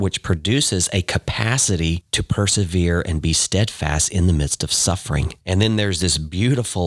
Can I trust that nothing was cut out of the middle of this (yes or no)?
yes